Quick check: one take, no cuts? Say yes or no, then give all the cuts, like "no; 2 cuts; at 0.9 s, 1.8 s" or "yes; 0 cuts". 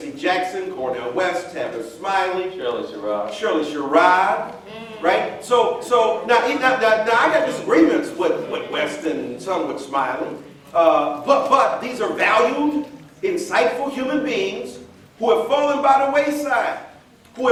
yes; 0 cuts